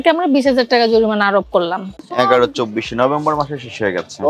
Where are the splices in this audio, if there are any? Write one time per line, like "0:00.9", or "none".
0:01.9